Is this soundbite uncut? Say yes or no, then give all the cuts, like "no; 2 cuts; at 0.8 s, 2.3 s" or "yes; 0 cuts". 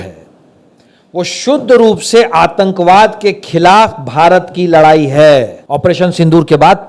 no; 1 cut; at 5.6 s